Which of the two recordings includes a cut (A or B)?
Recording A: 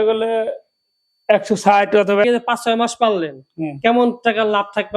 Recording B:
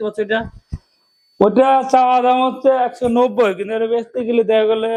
A